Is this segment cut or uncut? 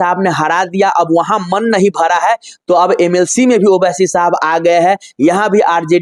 uncut